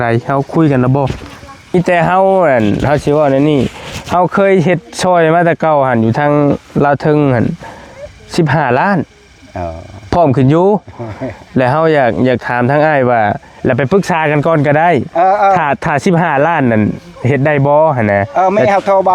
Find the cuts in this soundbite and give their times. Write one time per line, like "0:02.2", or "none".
0:01.7